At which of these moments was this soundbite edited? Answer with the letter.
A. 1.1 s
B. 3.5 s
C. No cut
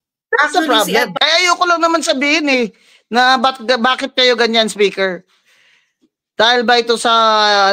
A